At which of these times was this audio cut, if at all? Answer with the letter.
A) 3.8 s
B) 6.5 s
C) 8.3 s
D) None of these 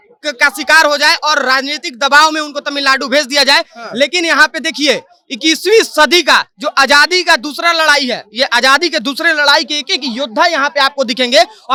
D